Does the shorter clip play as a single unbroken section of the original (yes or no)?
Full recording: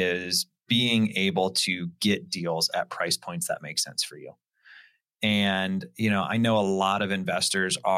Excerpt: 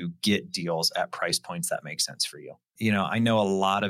no